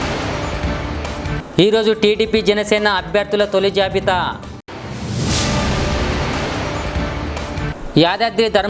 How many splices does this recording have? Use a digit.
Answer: 1